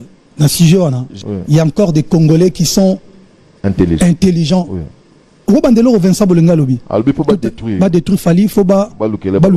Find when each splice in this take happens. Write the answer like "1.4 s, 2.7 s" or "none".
1.2 s